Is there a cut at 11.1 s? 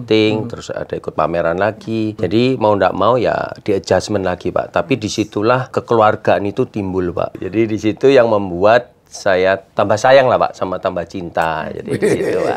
no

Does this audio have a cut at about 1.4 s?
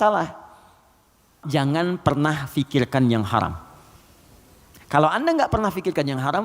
yes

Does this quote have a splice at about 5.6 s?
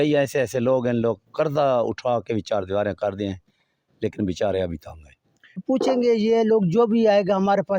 yes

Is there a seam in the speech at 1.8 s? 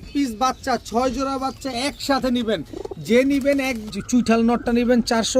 no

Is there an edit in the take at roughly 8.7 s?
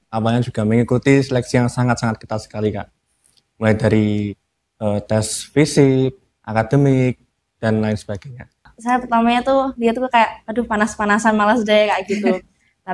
yes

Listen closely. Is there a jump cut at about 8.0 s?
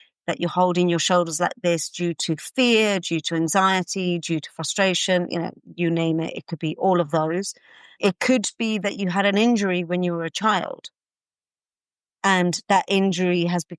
yes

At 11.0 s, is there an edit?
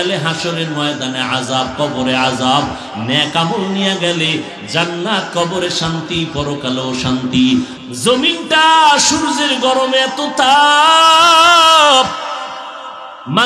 no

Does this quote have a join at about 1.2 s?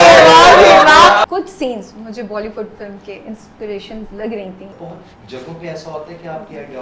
yes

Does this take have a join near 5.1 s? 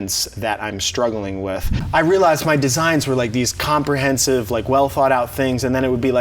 no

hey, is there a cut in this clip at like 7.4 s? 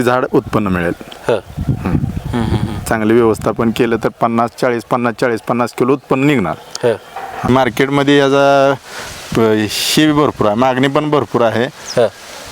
yes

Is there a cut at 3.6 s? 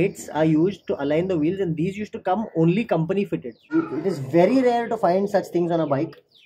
yes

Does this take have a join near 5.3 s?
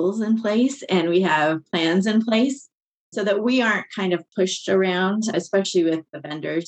yes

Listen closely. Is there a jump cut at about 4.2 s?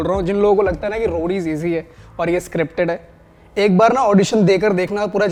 no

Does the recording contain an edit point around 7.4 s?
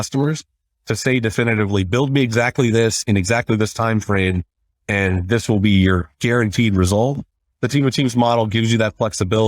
yes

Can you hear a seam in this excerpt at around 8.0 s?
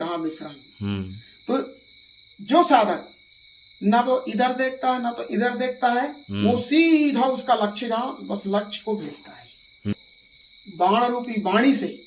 no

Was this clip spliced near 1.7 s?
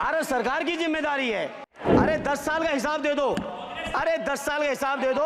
yes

